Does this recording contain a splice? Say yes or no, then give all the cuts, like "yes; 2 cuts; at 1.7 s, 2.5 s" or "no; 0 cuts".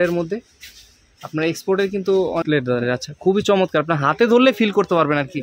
yes; 1 cut; at 2.4 s